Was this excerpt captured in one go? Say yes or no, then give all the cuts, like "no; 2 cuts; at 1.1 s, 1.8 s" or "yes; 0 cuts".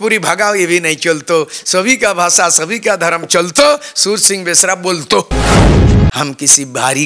no; 2 cuts; at 5.3 s, 6.2 s